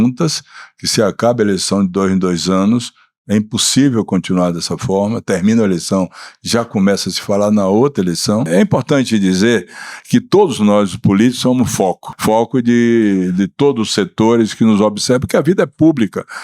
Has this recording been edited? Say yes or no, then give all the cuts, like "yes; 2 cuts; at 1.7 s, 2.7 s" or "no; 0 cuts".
yes; 2 cuts; at 8.5 s, 12.1 s